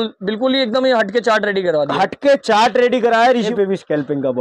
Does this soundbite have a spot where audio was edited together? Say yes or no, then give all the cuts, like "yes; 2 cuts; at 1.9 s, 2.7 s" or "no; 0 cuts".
yes; 1 cut; at 3.5 s